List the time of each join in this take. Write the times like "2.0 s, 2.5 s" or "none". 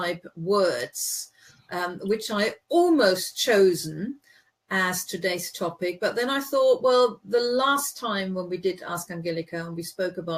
2.4 s